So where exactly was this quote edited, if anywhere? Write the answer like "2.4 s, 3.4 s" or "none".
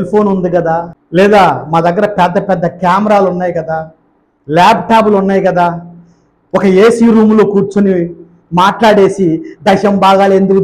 1.0 s